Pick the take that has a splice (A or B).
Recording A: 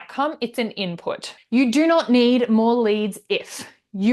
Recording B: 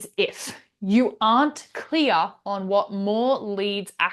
A